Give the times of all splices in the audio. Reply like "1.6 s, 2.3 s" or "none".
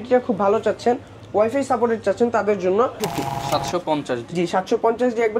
3.1 s